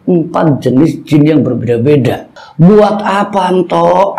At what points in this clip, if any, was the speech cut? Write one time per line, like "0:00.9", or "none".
0:02.3